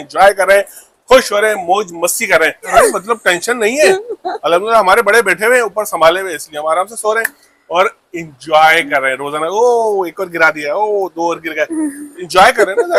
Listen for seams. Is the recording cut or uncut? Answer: uncut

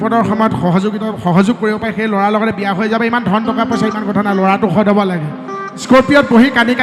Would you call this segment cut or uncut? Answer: cut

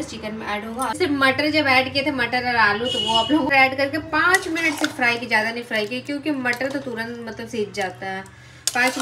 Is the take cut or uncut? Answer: cut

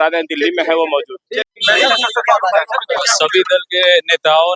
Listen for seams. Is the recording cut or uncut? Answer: uncut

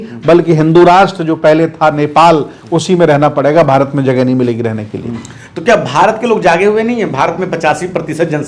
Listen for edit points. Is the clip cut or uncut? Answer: uncut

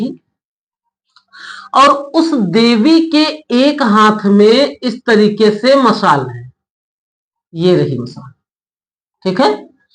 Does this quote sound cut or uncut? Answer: uncut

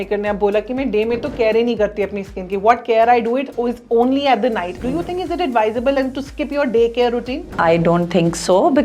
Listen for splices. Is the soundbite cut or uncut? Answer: cut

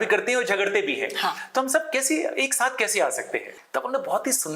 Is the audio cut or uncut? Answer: cut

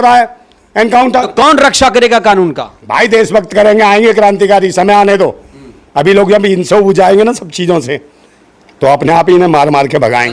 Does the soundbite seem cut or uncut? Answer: uncut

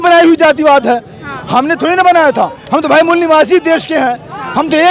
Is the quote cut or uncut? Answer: uncut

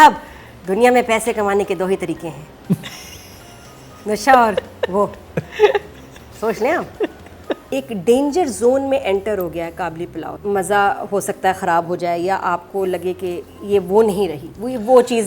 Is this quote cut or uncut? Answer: cut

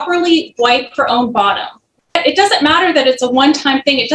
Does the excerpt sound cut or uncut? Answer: cut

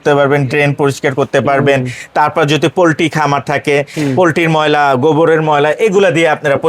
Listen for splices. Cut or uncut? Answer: uncut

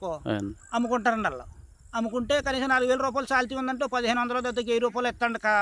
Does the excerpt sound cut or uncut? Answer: uncut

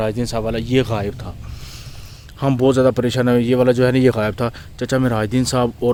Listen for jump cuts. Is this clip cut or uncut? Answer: uncut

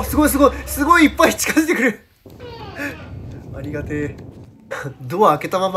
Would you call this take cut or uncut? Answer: cut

